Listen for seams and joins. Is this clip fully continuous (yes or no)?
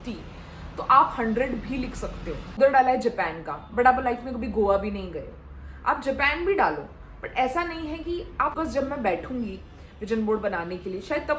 no